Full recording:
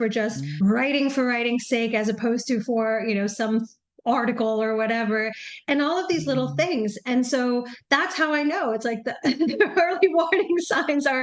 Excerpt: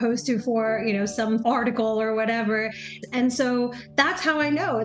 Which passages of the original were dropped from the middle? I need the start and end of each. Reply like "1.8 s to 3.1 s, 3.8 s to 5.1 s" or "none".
3.6 s to 4.0 s, 5.6 s to 6.9 s